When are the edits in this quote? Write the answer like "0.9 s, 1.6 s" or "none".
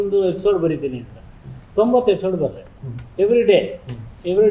none

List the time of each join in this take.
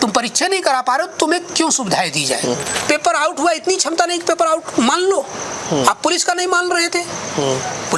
2.7 s

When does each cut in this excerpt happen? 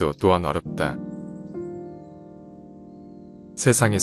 1.1 s, 3.0 s

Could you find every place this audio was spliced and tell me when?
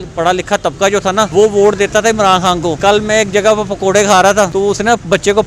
1.3 s, 2.8 s, 4.5 s

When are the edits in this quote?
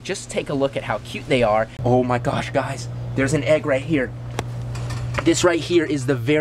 1.7 s

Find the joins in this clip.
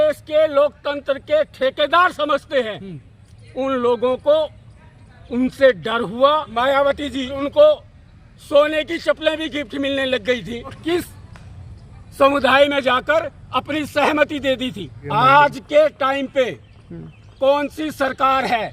6.5 s, 7.4 s, 10.8 s, 15.0 s

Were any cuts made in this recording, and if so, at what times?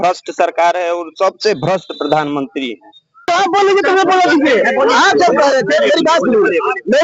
3.2 s

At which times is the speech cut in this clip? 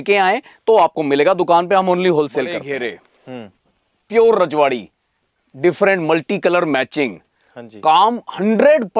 2.6 s

